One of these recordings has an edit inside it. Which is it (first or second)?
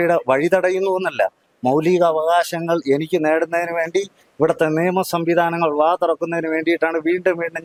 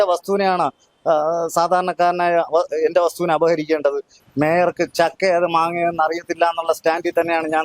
second